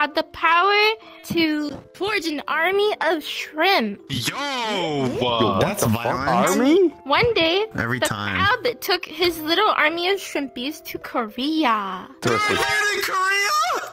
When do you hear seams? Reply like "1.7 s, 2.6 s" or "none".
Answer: 7.0 s